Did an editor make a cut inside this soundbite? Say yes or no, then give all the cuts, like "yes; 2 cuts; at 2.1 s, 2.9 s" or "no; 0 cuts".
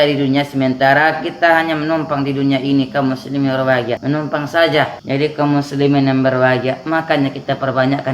yes; 2 cuts; at 4.0 s, 5.0 s